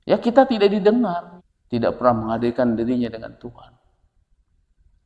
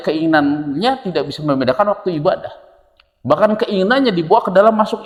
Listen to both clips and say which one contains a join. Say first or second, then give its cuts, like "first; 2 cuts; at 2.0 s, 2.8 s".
first; 1 cut; at 1.3 s